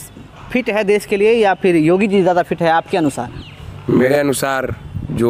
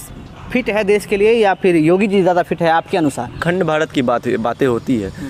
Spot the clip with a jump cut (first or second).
second